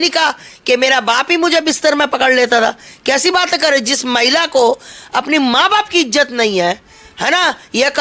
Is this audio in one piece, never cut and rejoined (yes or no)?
yes